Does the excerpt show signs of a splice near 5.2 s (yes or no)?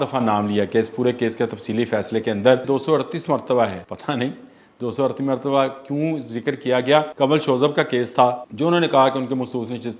no